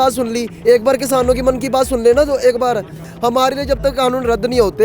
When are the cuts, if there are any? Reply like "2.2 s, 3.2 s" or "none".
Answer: none